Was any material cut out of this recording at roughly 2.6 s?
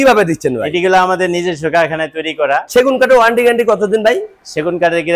yes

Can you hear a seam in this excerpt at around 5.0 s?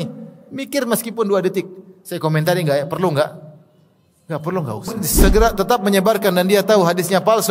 yes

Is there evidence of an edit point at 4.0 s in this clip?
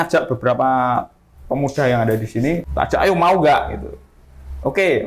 no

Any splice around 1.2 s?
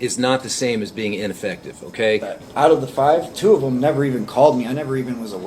no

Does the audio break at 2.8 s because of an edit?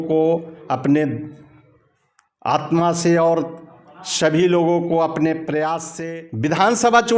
no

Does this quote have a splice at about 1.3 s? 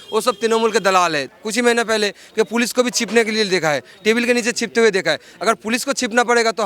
yes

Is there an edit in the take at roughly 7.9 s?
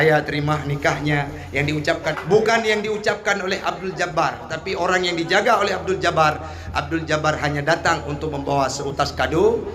no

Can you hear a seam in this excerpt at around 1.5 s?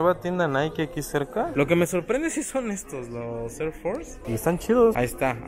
yes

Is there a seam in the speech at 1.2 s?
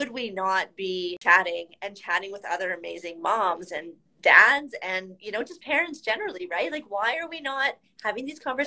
yes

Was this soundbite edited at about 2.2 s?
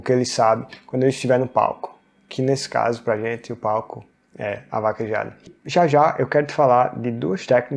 no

